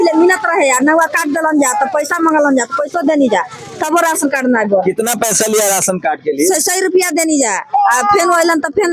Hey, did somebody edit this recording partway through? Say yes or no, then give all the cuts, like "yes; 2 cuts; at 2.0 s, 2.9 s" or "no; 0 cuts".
no; 0 cuts